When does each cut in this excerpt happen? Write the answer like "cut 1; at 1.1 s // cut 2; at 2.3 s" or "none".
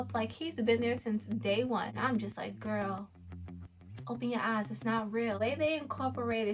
cut 1; at 1.9 s // cut 2; at 5.4 s